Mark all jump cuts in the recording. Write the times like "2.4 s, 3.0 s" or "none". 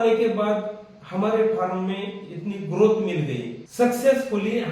3.6 s